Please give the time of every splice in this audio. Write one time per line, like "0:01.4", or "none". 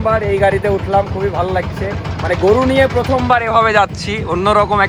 none